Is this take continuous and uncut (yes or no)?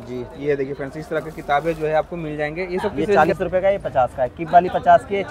no